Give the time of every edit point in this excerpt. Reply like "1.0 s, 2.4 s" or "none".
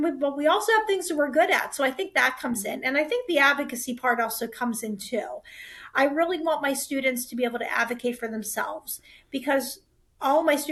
none